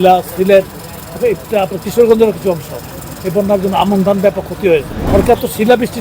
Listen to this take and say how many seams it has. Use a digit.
1